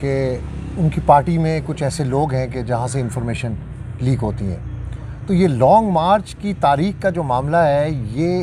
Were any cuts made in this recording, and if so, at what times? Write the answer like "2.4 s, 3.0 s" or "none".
none